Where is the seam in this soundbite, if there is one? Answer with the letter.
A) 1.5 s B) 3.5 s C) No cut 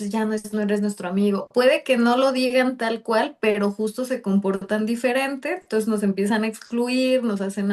A